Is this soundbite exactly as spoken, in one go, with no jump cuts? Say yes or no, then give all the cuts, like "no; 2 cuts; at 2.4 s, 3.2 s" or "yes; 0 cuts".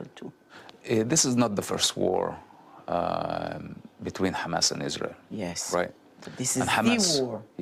yes; 0 cuts